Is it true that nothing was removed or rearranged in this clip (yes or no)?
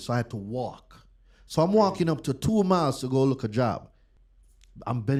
yes